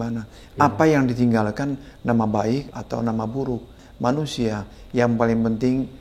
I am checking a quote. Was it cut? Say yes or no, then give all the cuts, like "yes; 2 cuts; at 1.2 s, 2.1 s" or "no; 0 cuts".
yes; 2 cuts; at 2.7 s, 3.8 s